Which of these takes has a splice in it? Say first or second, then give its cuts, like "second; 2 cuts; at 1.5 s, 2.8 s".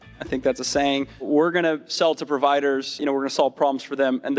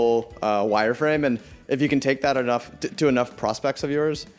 first; 2 cuts; at 1.2 s, 3.0 s